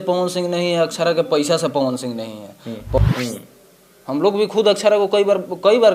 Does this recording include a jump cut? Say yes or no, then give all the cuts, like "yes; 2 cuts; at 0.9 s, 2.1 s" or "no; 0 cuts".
yes; 1 cut; at 3.0 s